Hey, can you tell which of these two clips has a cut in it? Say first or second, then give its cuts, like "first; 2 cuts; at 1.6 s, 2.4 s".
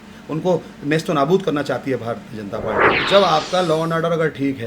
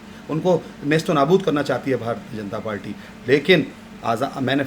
first; 1 cut; at 3.0 s